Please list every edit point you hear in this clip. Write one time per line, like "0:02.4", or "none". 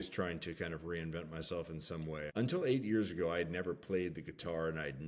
0:02.3